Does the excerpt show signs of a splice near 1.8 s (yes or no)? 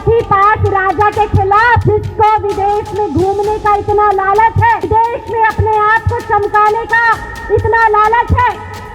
yes